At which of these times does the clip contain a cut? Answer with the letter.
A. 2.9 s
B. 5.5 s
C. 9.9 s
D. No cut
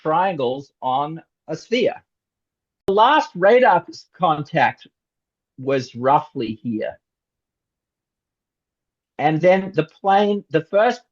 A